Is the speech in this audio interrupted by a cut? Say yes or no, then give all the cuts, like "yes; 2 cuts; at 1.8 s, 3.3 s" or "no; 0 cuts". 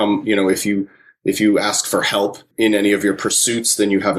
yes; 1 cut; at 2.5 s